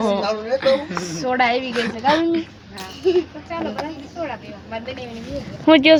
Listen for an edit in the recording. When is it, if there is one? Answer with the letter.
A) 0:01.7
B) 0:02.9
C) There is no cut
C